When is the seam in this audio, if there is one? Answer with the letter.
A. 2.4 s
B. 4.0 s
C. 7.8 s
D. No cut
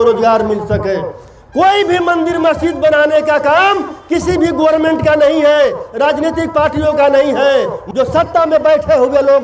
C